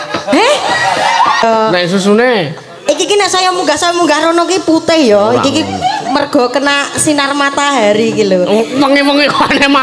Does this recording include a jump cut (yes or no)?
yes